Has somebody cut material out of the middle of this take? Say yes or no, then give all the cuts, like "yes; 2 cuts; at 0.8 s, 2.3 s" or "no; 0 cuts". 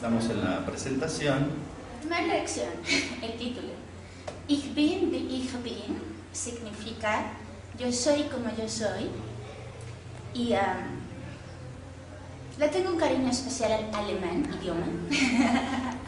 yes; 1 cut; at 8.9 s